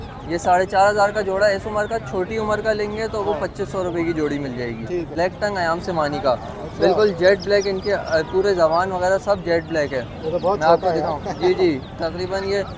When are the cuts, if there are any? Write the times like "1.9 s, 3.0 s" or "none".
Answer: 5.1 s